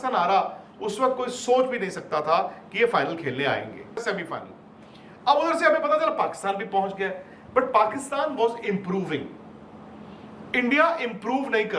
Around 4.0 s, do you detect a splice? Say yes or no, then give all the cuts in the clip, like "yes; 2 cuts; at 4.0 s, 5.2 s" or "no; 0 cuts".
yes; 1 cut; at 4.0 s